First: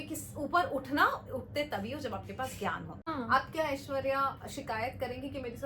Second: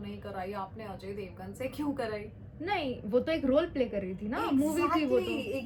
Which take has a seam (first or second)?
first